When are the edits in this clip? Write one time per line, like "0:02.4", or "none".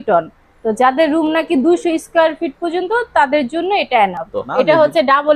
0:04.4